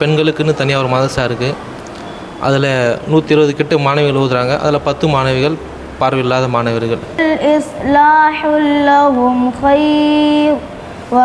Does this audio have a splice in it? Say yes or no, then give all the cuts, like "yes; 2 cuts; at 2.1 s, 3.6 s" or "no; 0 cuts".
yes; 1 cut; at 7.2 s